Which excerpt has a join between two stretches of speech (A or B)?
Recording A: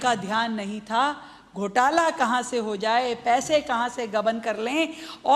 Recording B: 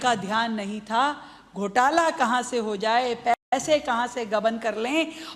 A